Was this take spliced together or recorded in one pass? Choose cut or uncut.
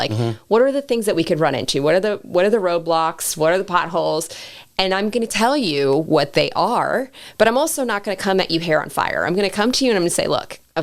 uncut